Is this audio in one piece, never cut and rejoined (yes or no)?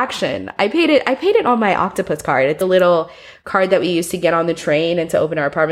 no